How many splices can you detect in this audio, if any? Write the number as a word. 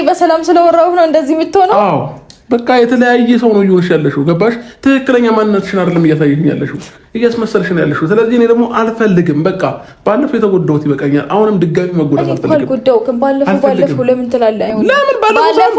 one